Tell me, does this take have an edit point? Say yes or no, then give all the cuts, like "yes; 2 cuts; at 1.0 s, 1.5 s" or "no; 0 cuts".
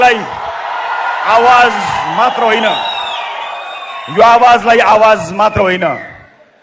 no; 0 cuts